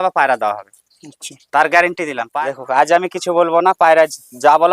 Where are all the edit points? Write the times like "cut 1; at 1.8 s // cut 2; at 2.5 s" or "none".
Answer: cut 1; at 2.3 s